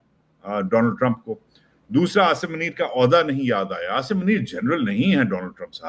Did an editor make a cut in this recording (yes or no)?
no